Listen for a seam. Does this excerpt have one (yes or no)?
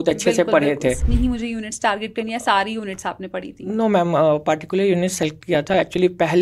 yes